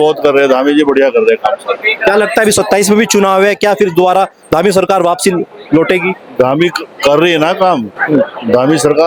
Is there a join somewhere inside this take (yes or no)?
no